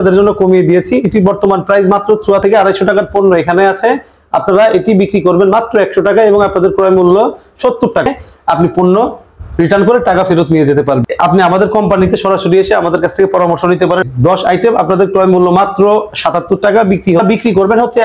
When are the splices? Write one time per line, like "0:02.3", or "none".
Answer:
0:02.4
0:08.1
0:11.1
0:14.0
0:17.2

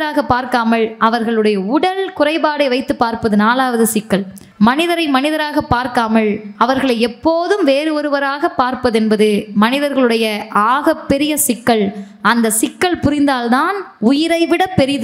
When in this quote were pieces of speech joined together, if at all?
0:04.4
0:06.5

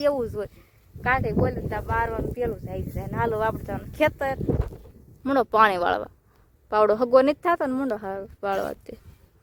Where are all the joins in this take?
none

